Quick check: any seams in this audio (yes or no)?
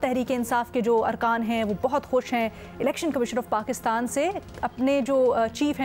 no